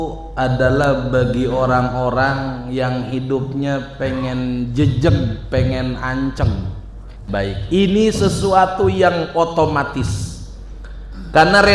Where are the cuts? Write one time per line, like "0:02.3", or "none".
0:07.2